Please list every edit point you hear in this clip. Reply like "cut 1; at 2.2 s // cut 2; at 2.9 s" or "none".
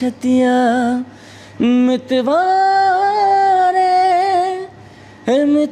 none